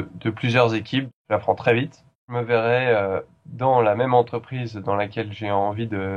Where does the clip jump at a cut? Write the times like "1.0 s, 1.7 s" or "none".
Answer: 1.1 s, 2.3 s